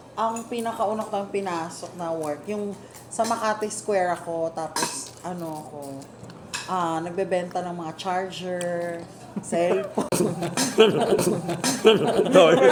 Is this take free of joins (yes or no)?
yes